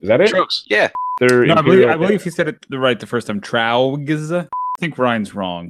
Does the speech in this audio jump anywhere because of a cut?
yes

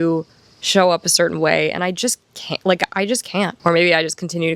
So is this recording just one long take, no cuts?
no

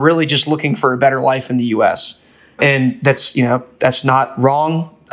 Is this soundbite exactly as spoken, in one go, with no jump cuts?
yes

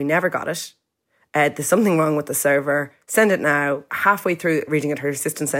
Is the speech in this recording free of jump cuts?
no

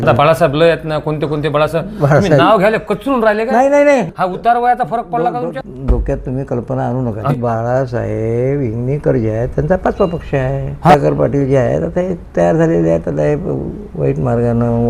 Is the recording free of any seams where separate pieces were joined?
no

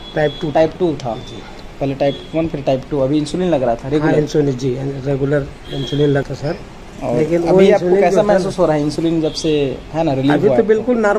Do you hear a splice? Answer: yes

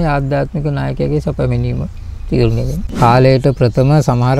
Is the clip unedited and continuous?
no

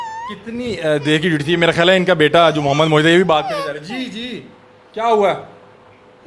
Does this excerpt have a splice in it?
no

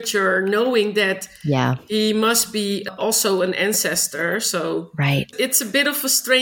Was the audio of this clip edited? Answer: no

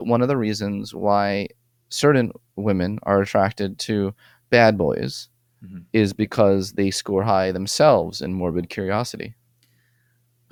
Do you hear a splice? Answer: no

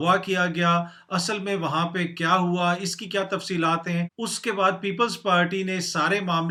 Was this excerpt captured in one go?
yes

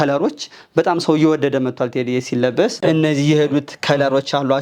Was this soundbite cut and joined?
yes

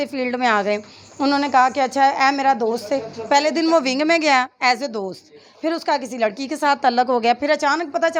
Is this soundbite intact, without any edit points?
yes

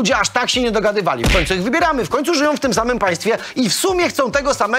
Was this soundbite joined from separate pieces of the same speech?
no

